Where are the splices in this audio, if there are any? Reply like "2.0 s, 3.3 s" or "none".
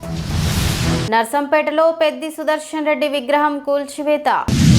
1.0 s